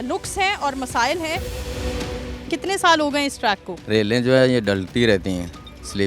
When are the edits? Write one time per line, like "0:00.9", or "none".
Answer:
0:02.0
0:03.7